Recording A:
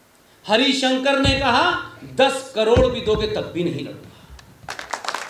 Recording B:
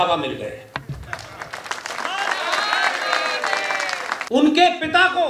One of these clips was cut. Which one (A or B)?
B